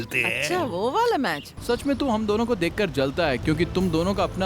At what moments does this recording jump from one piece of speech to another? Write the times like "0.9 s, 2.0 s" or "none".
1.5 s